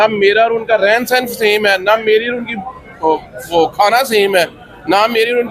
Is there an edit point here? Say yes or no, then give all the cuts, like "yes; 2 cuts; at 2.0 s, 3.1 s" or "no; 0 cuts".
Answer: no; 0 cuts